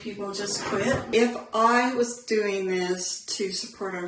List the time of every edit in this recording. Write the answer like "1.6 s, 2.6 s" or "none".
1.0 s